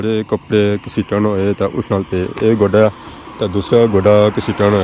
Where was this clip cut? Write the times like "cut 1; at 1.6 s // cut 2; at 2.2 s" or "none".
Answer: none